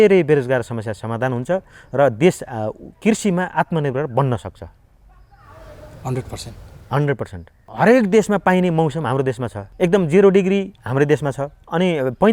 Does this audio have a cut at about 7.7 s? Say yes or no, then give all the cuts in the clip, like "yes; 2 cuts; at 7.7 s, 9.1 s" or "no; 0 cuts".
no; 0 cuts